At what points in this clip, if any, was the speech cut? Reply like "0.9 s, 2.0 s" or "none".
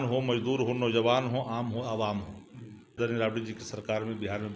3.0 s